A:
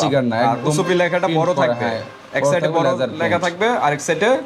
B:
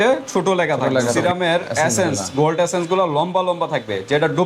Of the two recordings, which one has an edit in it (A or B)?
B